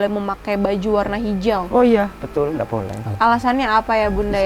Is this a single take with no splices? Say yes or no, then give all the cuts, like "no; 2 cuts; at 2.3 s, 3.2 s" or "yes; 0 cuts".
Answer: no; 1 cut; at 3.0 s